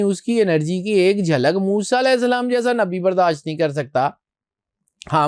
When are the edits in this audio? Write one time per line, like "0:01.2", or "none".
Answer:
none